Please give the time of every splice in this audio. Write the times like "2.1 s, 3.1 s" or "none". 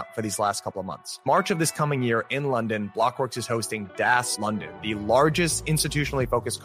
4.3 s